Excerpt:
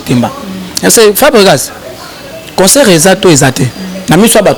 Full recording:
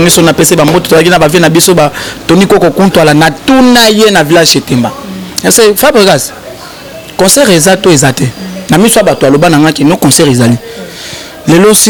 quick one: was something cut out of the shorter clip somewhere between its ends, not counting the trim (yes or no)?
no